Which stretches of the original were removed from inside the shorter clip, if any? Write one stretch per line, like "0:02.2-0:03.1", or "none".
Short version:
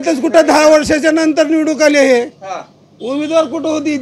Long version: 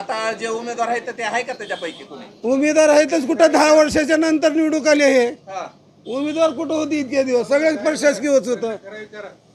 none